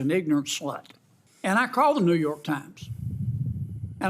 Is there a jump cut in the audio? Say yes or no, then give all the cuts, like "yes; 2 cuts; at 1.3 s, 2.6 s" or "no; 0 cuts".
yes; 1 cut; at 1.1 s